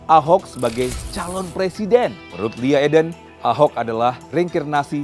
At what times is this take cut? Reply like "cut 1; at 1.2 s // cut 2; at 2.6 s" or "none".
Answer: cut 1; at 2.3 s // cut 2; at 3.2 s // cut 3; at 4.2 s